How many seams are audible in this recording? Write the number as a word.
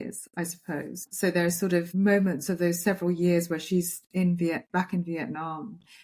two